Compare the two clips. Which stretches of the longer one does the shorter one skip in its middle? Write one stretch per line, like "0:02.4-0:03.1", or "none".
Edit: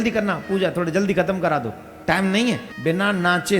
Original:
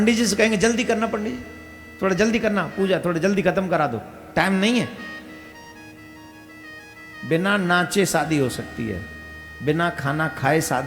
0:05.0-0:07.1